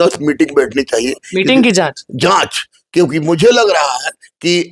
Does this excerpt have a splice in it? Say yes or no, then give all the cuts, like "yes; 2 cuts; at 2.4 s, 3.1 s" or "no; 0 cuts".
no; 0 cuts